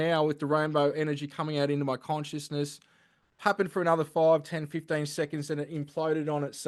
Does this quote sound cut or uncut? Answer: uncut